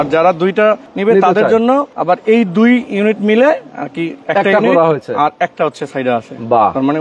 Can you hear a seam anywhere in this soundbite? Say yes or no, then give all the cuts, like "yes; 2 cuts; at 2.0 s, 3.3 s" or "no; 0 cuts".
yes; 3 cuts; at 0.9 s, 1.9 s, 4.1 s